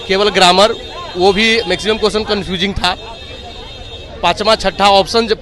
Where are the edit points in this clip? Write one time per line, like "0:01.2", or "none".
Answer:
none